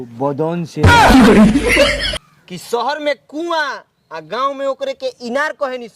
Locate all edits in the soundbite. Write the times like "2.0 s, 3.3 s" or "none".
0.8 s, 2.6 s